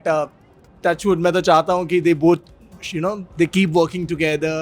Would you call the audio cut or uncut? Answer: uncut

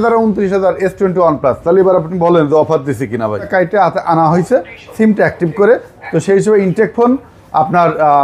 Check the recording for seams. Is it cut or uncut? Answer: cut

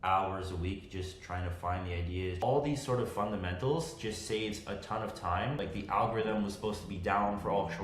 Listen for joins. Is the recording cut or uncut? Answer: cut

